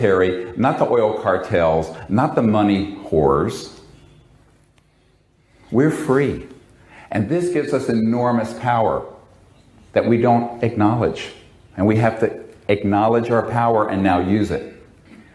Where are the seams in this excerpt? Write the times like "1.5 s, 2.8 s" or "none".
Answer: 7.4 s